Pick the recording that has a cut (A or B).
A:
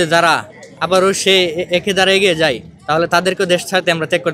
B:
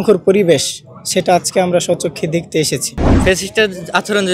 B